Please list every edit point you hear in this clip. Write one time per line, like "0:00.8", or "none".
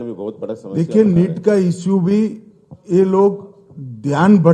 none